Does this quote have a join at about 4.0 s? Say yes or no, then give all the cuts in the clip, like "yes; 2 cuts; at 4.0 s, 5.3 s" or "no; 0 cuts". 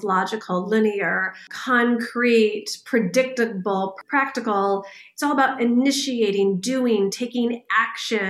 yes; 2 cuts; at 1.5 s, 4.0 s